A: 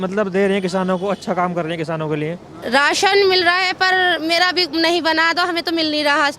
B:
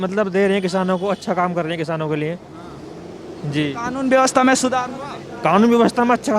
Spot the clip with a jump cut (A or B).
A